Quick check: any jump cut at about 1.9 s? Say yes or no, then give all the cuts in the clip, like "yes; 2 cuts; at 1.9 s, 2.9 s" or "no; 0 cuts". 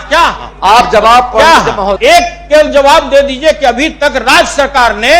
yes; 1 cut; at 1.9 s